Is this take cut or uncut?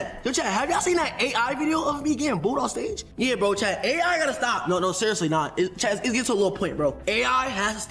uncut